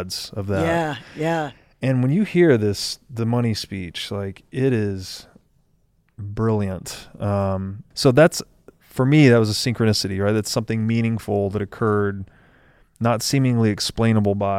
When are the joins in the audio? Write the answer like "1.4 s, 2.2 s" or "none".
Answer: 7.8 s